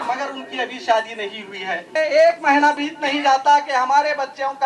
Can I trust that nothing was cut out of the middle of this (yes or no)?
no